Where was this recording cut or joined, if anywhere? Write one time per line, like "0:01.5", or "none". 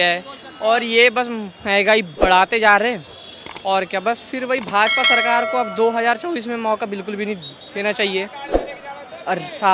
none